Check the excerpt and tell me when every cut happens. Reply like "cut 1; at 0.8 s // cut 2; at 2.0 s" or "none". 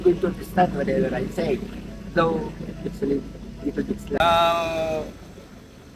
cut 1; at 4.2 s

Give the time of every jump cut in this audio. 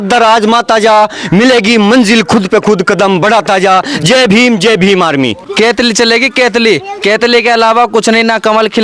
cut 1; at 5.4 s

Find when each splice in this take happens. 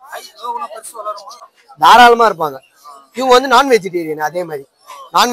cut 1; at 1.4 s

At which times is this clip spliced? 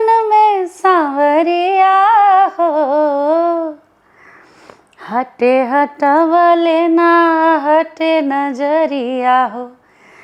none

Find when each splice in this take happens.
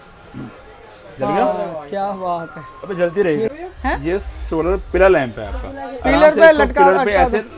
cut 1; at 3.5 s

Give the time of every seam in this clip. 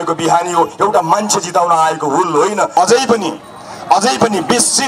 cut 1; at 2.7 s

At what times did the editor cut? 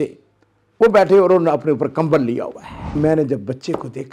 cut 1; at 3.0 s

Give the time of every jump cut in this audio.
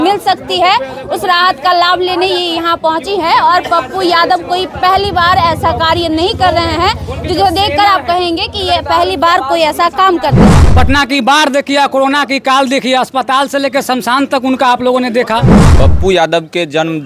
cut 1; at 10.6 s // cut 2; at 15.6 s

